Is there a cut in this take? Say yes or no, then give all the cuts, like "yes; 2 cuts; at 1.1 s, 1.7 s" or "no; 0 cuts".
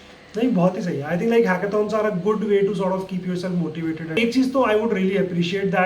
yes; 1 cut; at 4.2 s